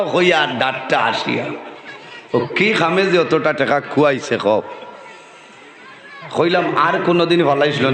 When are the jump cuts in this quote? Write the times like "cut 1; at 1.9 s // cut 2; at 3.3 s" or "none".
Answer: none